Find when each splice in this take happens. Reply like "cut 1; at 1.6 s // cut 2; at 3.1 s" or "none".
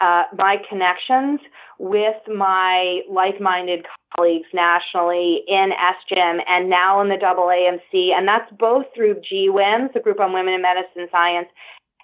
none